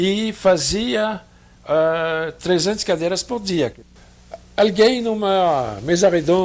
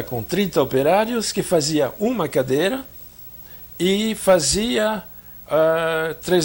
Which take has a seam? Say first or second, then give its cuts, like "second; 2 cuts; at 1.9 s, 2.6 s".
first; 1 cut; at 3.8 s